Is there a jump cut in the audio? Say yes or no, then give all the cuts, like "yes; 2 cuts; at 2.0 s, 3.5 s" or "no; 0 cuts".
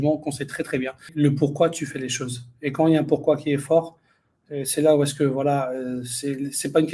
yes; 1 cut; at 1.1 s